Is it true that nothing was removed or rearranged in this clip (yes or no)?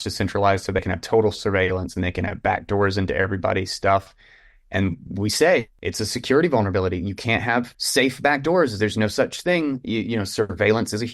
no